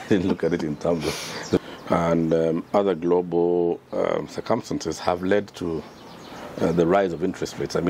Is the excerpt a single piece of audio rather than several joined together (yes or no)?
no